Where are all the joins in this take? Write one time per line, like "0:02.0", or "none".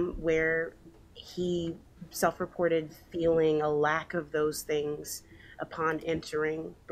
none